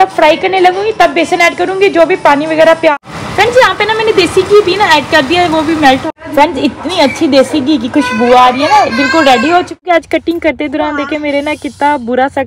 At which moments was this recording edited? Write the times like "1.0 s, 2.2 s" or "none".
2.9 s, 6.0 s, 9.8 s